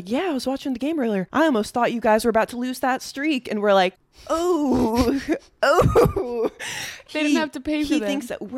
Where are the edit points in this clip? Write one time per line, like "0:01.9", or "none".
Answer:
0:04.1
0:07.1